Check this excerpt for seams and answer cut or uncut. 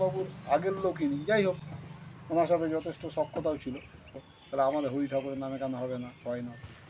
cut